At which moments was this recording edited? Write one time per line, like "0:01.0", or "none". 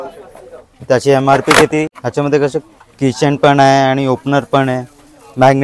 0:02.0